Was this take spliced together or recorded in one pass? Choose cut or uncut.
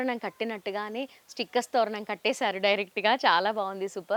uncut